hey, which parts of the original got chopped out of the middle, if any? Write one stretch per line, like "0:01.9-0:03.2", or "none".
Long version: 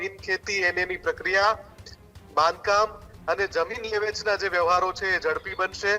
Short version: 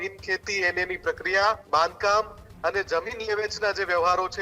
0:01.6-0:02.3